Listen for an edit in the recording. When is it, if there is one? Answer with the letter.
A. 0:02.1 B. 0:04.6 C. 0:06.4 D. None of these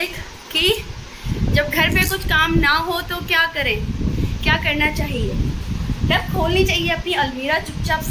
D